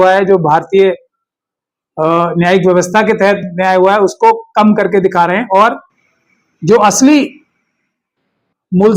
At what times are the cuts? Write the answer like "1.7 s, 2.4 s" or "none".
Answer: none

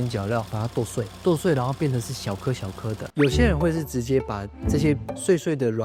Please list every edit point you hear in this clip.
none

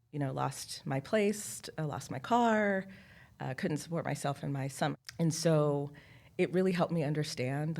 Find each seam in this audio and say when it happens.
4.9 s

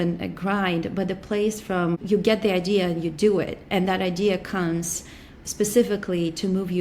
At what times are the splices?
2.0 s

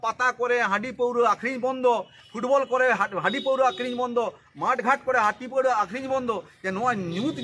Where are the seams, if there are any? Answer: none

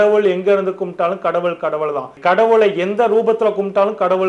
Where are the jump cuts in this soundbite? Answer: none

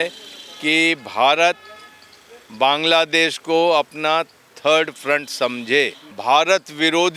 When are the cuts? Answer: 6.1 s

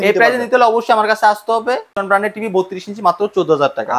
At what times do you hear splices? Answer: 1.9 s

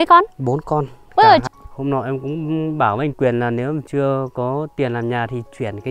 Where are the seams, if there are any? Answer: 1.4 s

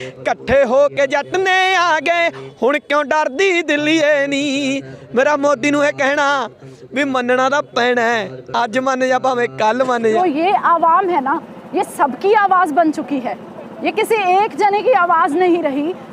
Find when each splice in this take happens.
10.2 s

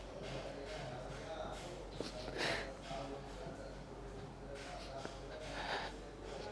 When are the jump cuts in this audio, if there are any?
none

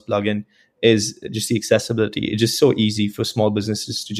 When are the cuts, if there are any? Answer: none

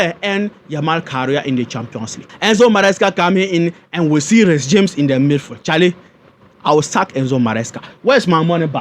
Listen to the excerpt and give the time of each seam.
2.3 s

